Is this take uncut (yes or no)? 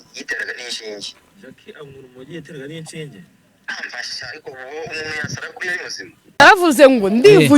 no